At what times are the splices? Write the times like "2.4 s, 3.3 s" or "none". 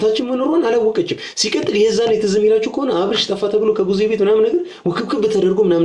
none